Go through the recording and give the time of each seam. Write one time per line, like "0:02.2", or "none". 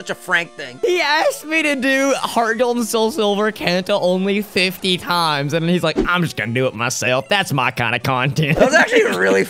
0:00.8
0:08.6